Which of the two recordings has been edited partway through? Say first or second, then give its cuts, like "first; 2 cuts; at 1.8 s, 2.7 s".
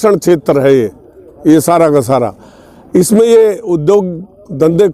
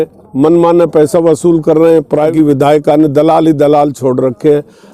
second; 1 cut; at 2.3 s